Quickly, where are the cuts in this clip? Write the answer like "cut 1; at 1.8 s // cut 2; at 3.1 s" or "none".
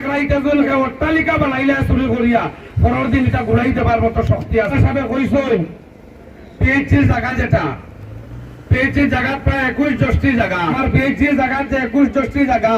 cut 1; at 4.7 s // cut 2; at 10.8 s